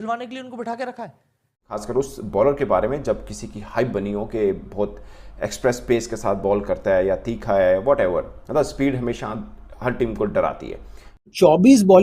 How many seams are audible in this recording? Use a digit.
2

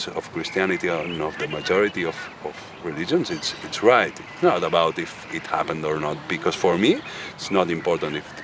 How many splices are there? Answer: 0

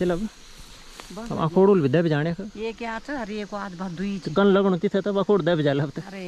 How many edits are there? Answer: 0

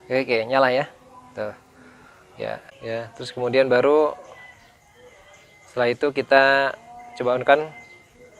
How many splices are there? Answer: 1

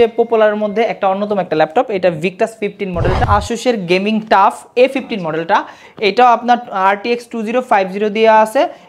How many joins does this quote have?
1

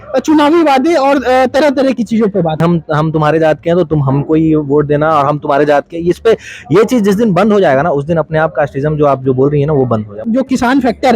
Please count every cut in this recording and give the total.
2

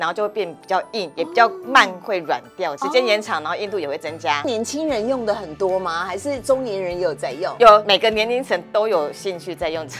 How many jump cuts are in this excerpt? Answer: 4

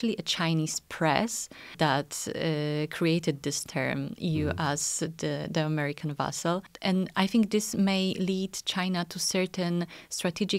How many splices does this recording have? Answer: 2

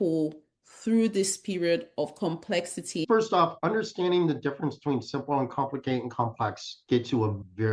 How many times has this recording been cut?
1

